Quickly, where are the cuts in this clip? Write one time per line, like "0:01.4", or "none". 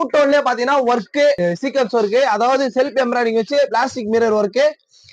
0:01.4

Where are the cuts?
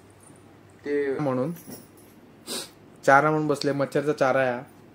0:01.2

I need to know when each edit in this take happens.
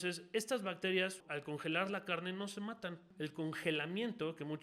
0:01.3
0:03.0

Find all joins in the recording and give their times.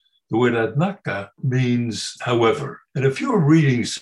0:01.3
0:02.1
0:02.8

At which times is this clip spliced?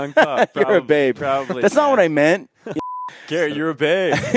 0:02.8

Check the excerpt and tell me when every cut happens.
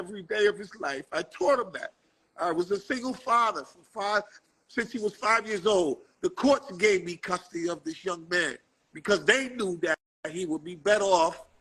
none

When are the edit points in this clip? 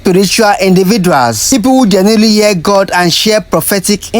0:01.4

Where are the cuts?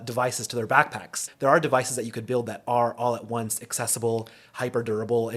0:01.3

